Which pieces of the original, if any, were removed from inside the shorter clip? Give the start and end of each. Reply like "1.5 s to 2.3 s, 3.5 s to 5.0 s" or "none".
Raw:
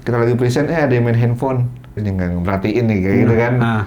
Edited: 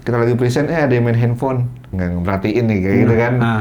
1.8 s to 2.0 s

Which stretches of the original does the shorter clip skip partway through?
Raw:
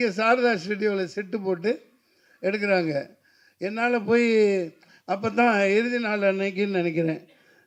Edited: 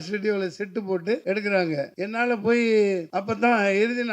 1.8 s to 2.4 s, 3.1 s to 3.6 s, 4.7 s to 5.1 s

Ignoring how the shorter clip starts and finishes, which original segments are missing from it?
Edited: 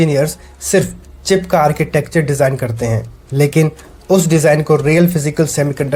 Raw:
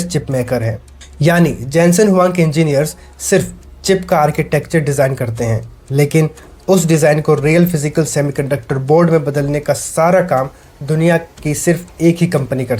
none

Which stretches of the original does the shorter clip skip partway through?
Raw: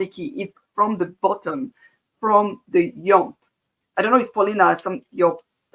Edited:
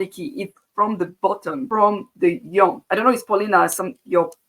1.7 s to 2.2 s, 3.3 s to 3.9 s

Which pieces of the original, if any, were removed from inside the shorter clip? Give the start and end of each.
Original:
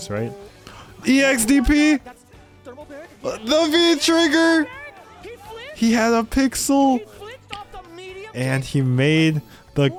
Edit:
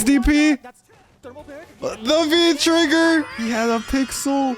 4.8 s to 5.8 s

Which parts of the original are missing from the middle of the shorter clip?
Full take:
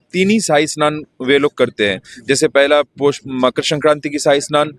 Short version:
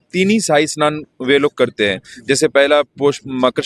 none

